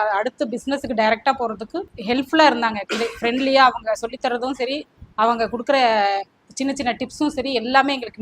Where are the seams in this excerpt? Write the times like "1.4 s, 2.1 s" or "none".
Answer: 1.9 s

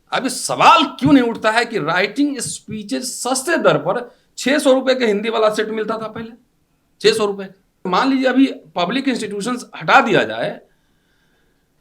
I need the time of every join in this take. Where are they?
7.9 s

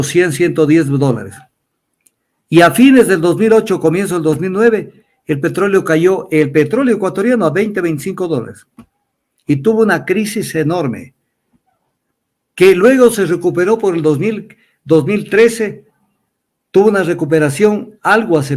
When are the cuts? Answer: none

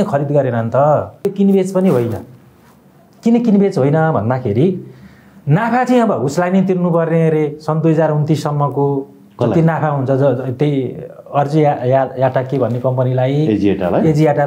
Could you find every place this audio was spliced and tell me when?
1.3 s

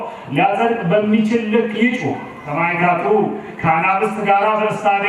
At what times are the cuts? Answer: 2.4 s

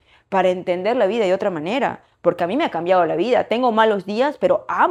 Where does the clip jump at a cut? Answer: none

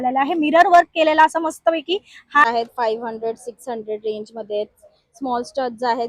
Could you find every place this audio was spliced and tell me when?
2.4 s

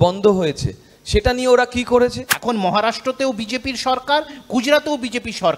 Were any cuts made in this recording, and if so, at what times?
2.3 s

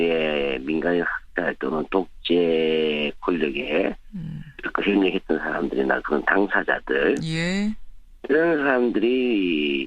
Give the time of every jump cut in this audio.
none

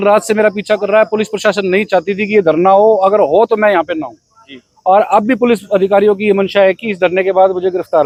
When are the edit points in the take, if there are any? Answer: none

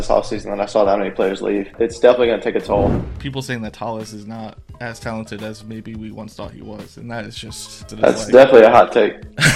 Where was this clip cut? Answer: 1.7 s, 3.0 s, 7.9 s

